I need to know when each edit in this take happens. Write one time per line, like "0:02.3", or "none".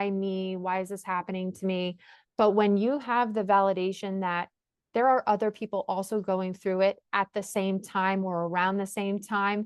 none